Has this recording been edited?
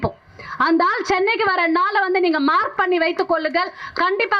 no; 0 cuts

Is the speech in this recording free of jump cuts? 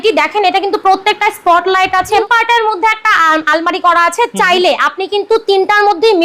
no; 1 cut; at 2.2 s

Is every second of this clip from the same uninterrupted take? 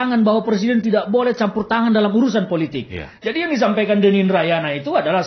yes; 0 cuts

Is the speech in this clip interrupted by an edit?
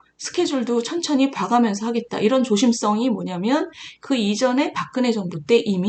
no; 0 cuts

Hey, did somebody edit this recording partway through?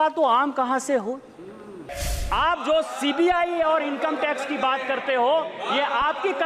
yes; 1 cut; at 2.1 s

